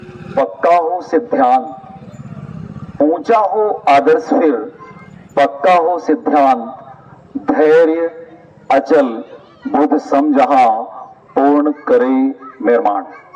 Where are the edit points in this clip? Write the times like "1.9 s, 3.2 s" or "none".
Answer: none